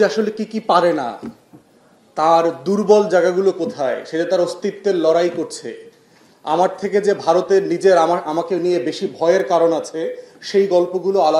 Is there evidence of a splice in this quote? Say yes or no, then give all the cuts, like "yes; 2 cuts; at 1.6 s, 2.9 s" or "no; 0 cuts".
no; 0 cuts